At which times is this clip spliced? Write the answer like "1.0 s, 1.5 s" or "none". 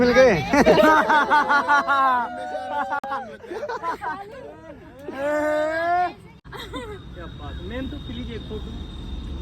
6.5 s